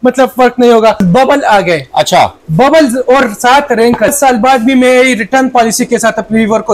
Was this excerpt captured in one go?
no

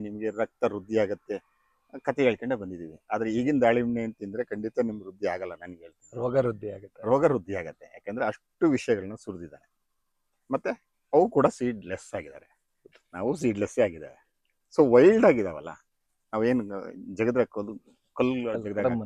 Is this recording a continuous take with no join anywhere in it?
yes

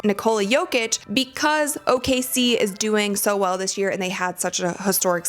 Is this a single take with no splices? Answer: no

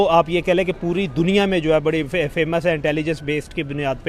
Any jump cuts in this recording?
no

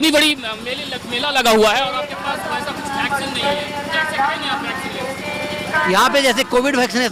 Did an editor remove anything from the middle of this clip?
no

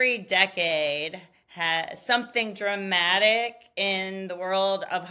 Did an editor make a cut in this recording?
no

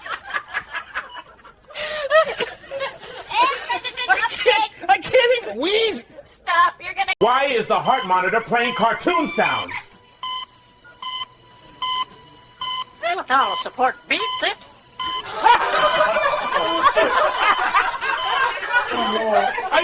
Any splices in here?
no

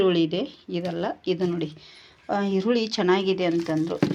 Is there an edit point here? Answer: no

